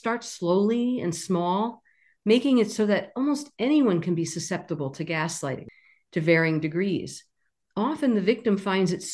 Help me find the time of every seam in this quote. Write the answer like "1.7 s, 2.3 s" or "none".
5.6 s

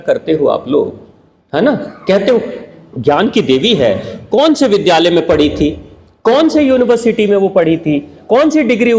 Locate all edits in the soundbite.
none

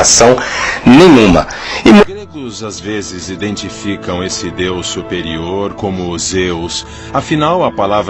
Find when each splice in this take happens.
2.0 s

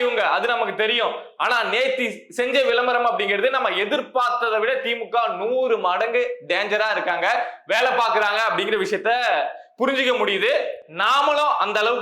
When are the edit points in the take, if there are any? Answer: none

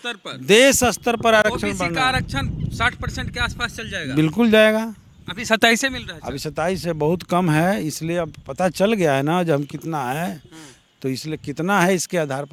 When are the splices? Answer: none

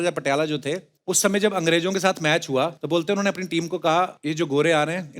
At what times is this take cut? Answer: 0.9 s, 2.8 s, 4.2 s

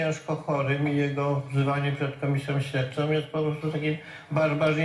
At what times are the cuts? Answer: none

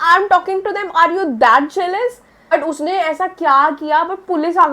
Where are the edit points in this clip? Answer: 2.5 s

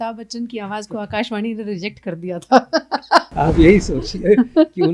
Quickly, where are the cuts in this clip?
3.3 s

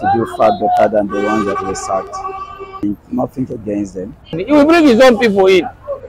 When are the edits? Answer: 2.8 s, 4.4 s

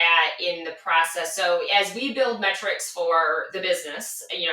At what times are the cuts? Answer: 1.7 s

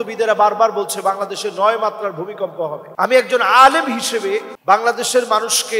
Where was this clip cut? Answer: 2.8 s, 4.5 s

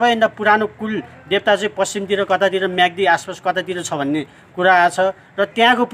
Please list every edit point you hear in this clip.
none

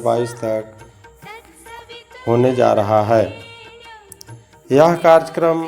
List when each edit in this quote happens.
0.8 s, 2.2 s

